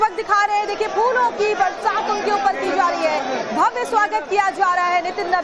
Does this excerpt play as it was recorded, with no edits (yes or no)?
no